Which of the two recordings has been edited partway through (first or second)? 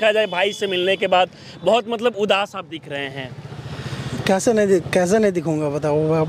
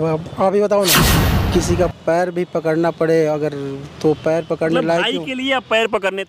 second